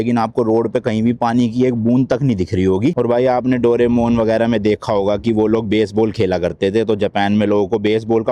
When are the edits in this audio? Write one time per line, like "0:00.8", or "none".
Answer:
0:02.9